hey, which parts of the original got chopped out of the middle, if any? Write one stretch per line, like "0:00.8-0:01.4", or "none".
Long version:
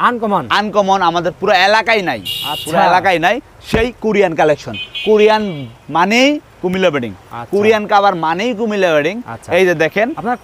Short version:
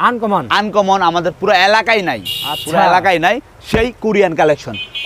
none